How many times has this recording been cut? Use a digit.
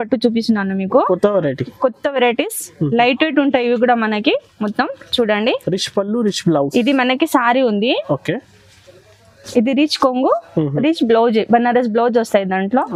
0